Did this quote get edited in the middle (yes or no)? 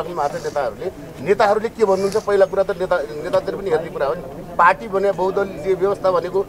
no